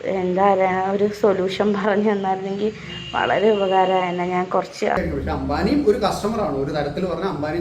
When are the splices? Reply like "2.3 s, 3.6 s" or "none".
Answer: 5.0 s